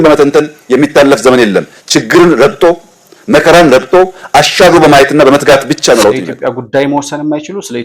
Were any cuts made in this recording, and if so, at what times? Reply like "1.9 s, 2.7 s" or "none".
6.3 s